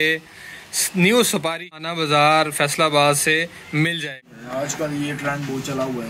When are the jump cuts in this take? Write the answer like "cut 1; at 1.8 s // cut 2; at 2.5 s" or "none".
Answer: cut 1; at 1.8 s // cut 2; at 4.0 s

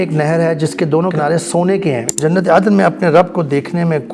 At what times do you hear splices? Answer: cut 1; at 1.1 s // cut 2; at 2.1 s

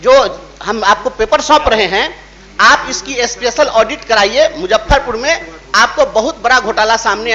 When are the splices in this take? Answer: none

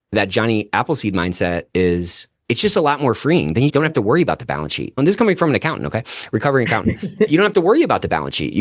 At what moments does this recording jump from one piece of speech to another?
cut 1; at 4.9 s // cut 2; at 7.3 s

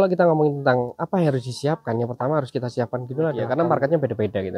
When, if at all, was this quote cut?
cut 1; at 3.5 s

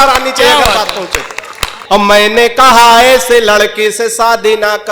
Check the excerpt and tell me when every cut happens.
cut 1; at 1.7 s

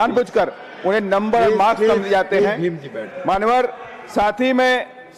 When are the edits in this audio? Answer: none

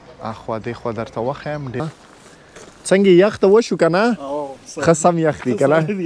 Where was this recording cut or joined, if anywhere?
cut 1; at 1.8 s

